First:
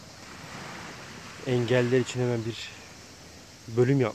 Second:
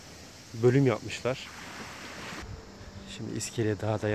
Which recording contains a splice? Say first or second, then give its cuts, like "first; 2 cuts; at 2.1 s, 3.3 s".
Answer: second; 1 cut; at 2.4 s